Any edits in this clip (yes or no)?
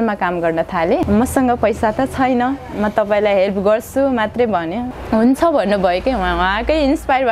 yes